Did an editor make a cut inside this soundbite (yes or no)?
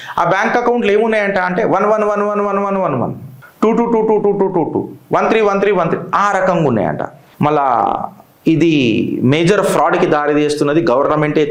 no